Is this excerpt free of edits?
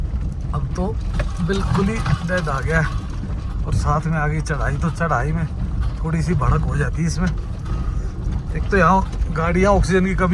yes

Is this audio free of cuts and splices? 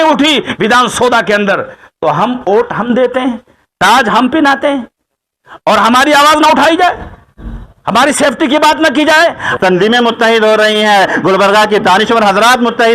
no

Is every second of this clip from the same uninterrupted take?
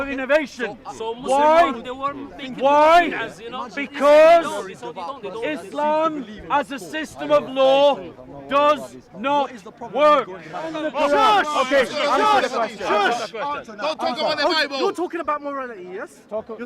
no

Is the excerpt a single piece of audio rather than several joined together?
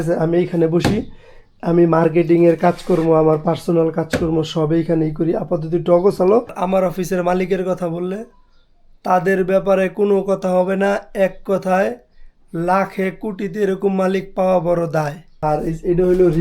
no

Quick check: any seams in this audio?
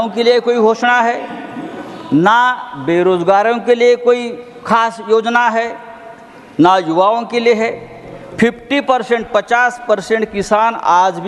no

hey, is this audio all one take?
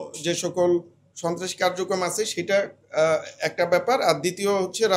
yes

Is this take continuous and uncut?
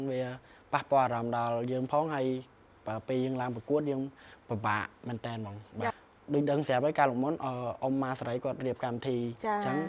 no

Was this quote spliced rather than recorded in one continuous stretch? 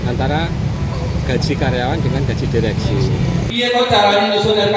yes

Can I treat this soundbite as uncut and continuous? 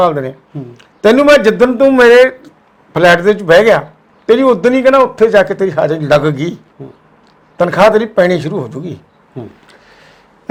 yes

